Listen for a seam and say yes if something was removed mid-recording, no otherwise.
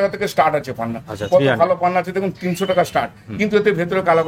no